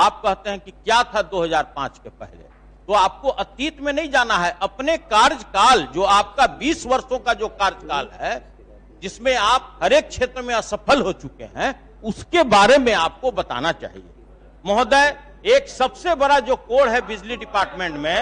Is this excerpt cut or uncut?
uncut